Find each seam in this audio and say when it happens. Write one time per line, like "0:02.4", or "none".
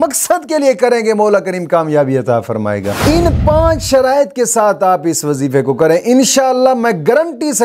0:02.9